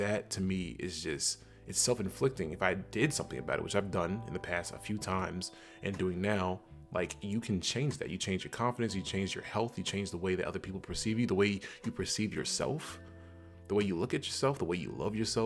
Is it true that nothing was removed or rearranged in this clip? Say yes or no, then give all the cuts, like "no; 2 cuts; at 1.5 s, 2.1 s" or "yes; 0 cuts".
yes; 0 cuts